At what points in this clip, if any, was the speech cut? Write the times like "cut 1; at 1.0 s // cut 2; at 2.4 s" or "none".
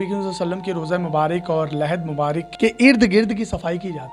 none